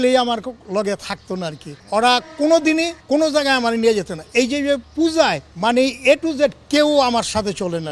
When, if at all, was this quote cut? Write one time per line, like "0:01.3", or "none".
0:01.7
0:03.0
0:04.9
0:05.5